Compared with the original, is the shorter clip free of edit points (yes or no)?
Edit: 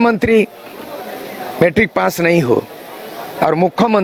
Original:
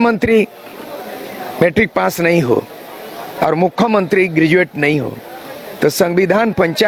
yes